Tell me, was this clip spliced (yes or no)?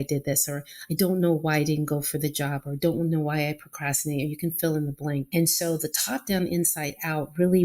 yes